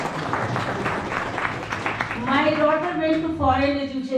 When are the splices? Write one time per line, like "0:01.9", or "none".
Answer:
none